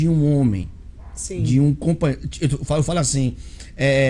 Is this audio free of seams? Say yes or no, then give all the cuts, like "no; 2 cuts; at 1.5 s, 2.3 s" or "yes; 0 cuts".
yes; 0 cuts